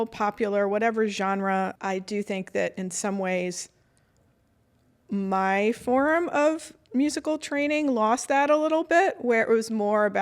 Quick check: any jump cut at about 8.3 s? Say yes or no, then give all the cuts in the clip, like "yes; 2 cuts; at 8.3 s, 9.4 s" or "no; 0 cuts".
no; 1 cut; at 1.7 s